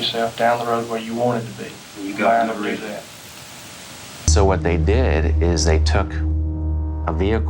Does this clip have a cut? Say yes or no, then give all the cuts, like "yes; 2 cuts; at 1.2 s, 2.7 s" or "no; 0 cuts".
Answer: yes; 1 cut; at 4.2 s